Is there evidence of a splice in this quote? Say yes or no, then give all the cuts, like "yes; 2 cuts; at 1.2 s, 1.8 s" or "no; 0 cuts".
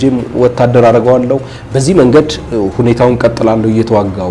no; 0 cuts